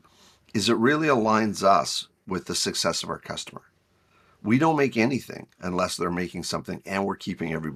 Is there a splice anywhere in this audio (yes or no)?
no